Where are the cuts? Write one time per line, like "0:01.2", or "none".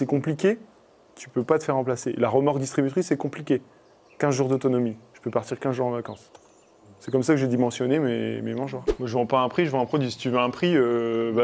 0:08.9